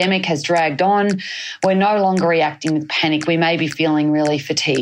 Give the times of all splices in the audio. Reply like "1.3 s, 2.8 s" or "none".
none